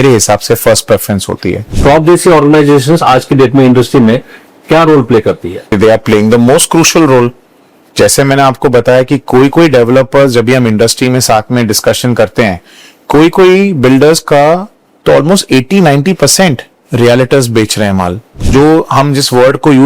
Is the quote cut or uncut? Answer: cut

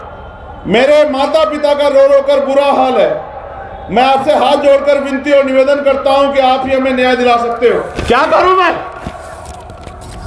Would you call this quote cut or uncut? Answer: cut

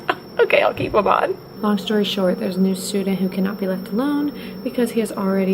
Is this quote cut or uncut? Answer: cut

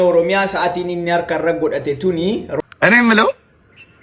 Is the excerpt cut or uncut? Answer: cut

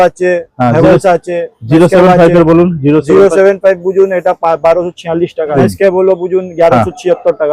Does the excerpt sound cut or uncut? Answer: cut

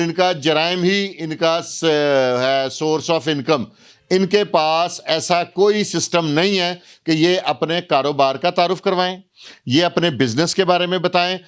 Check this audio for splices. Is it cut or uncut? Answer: uncut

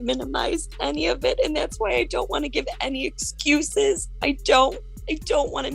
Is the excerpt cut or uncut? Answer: uncut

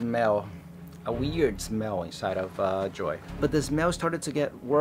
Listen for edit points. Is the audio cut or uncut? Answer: cut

